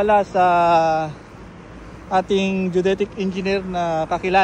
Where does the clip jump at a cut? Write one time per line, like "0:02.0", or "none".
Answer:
none